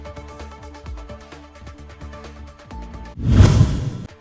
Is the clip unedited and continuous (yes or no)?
no